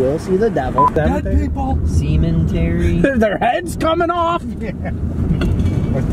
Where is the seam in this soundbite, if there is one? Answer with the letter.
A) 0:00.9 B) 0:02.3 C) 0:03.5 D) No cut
A